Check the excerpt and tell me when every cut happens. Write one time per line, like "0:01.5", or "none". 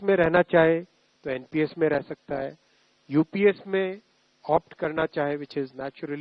none